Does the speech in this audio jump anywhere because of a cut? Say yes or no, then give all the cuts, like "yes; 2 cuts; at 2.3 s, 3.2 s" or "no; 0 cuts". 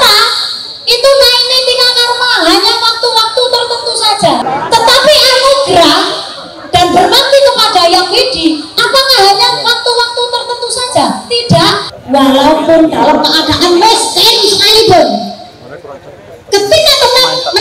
yes; 2 cuts; at 4.4 s, 11.9 s